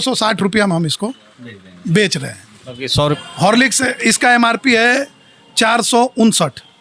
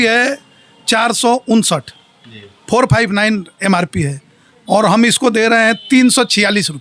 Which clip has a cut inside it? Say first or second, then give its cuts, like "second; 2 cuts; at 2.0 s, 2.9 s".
first; 1 cut; at 3.1 s